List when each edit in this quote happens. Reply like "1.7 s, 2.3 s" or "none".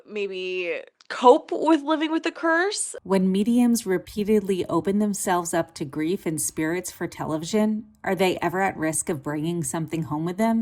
2.9 s